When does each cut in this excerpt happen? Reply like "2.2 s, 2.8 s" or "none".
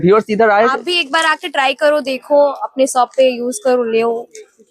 none